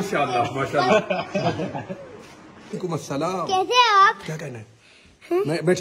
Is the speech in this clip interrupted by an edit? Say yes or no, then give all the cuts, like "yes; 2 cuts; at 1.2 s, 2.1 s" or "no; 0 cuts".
yes; 1 cut; at 2.8 s